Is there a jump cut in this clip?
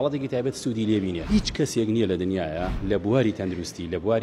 yes; 2 cuts; at 1.2 s, 2.7 s

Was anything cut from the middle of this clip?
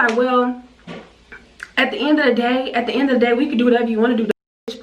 no; 0 cuts

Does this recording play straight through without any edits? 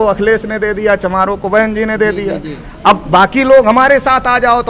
yes; 0 cuts

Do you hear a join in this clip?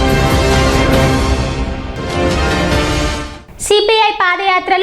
yes; 2 cuts; at 1.5 s, 3.3 s

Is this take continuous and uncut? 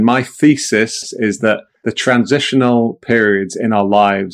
no; 2 cuts; at 1.0 s, 1.7 s

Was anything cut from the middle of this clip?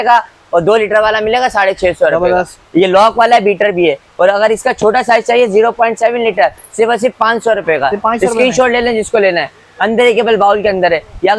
no; 0 cuts

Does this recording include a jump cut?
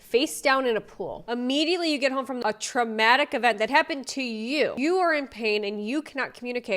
yes; 3 cuts; at 1.2 s, 2.4 s, 4.7 s

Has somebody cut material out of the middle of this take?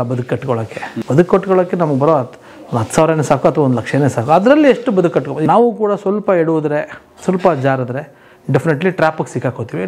yes; 2 cuts; at 0.9 s, 5.3 s

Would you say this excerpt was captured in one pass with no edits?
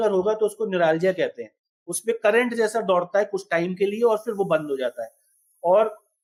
yes; 0 cuts

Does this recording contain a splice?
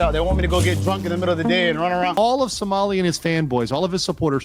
yes; 1 cut; at 2.2 s

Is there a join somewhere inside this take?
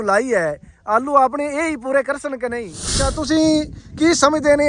yes; 1 cut; at 3.0 s

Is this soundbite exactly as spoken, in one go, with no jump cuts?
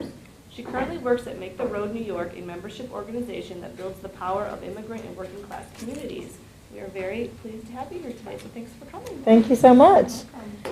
no; 1 cut; at 2.0 s

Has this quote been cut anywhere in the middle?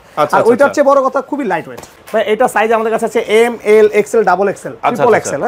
yes; 1 cut; at 2.0 s

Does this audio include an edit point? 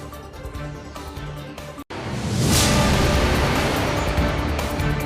yes; 1 cut; at 1.0 s

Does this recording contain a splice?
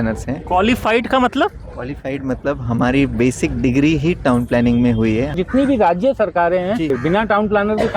yes; 2 cuts; at 5.4 s, 6.9 s

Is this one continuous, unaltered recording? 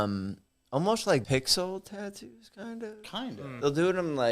no; 1 cut; at 1.2 s

